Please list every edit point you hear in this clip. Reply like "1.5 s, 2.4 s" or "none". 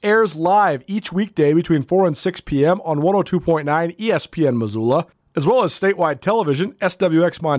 5.2 s